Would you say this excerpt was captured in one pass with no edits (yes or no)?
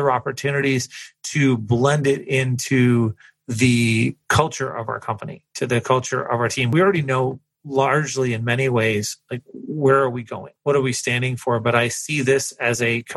no